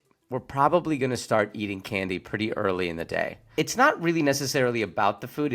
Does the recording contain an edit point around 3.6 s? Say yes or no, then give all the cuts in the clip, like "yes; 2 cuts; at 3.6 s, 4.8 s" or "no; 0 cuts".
yes; 1 cut; at 3.6 s